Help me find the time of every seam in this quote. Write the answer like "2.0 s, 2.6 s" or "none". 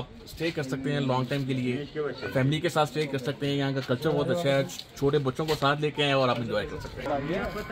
none